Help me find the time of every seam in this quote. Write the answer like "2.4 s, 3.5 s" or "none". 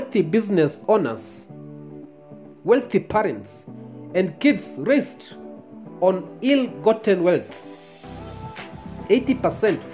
7.5 s, 9.1 s